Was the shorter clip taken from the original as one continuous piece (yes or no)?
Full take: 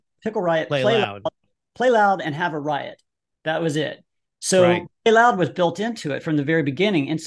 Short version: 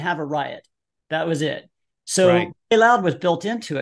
yes